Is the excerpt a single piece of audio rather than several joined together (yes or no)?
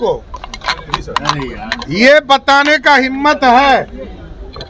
yes